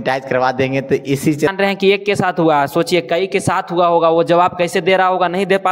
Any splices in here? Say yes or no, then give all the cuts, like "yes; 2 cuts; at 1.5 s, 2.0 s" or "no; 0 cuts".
yes; 1 cut; at 1.5 s